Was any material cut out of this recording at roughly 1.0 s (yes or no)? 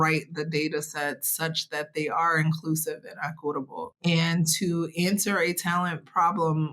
no